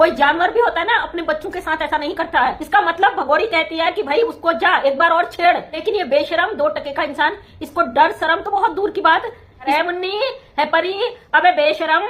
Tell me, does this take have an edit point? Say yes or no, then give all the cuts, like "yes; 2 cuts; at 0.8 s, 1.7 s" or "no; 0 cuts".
yes; 3 cuts; at 2.6 s, 5.8 s, 9.7 s